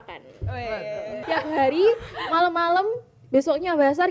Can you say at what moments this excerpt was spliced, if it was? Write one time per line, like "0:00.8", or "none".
0:01.2